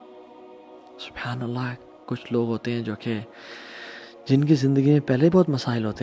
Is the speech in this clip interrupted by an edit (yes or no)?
yes